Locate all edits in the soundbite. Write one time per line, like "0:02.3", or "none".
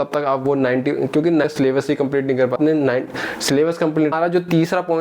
0:01.5
0:02.6
0:04.1